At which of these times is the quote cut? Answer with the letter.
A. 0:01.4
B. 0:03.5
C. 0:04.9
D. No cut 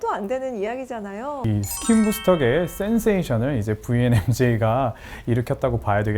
A